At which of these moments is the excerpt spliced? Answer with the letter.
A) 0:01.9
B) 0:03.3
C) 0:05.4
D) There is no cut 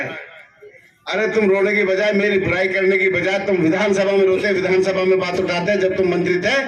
D